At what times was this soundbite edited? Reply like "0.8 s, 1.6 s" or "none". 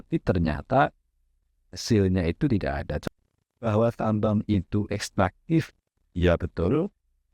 3.0 s

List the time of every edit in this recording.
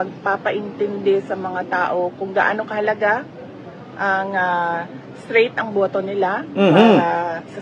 none

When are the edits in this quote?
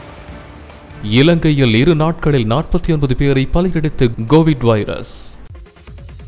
none

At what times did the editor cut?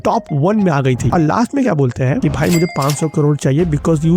1.1 s

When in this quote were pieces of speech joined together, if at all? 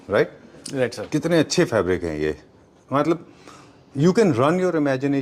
none

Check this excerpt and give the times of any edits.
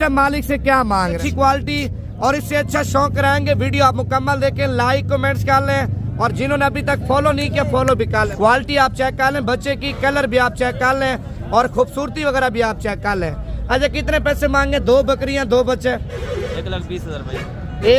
1.2 s, 8.3 s

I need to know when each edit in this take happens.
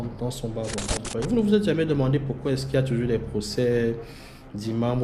1.0 s

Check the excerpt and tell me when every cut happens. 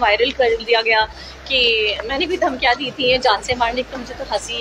none

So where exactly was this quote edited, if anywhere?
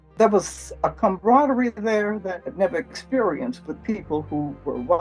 0.9 s, 2.4 s

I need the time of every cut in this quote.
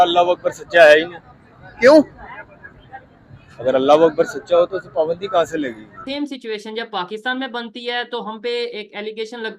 6.0 s

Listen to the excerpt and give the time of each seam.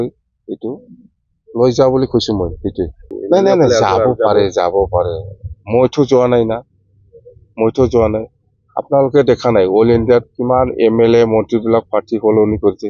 3.1 s

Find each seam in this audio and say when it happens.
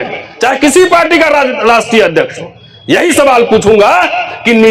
none

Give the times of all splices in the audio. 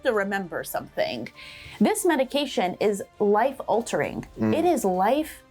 none

